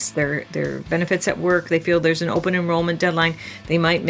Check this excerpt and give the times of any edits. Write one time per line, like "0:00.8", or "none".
none

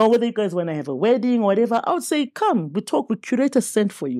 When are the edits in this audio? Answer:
none

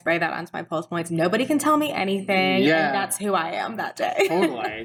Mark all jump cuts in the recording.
none

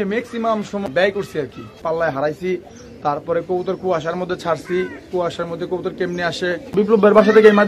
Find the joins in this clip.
0:00.9
0:01.8
0:06.7

